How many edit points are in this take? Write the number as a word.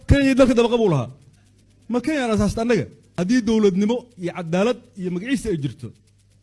one